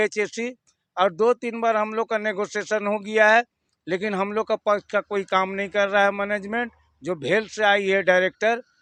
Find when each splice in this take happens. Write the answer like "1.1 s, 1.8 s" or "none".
none